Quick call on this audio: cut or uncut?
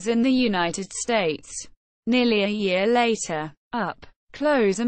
cut